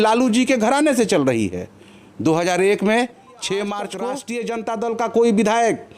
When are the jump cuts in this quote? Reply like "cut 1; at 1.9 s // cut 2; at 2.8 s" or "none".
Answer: cut 1; at 4.2 s